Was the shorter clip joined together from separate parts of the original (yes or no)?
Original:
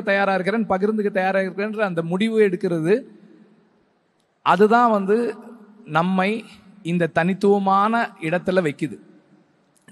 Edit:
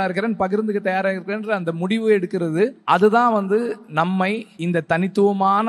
yes